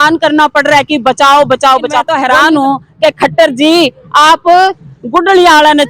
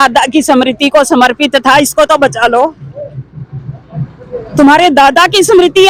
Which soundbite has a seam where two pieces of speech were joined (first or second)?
first